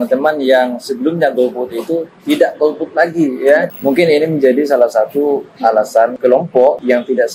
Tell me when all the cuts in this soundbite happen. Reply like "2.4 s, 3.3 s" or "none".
3.7 s